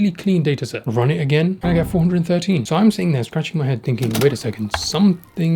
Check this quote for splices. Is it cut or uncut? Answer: cut